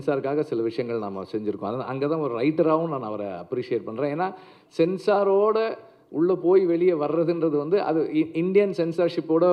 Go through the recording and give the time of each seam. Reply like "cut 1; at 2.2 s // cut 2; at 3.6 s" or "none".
none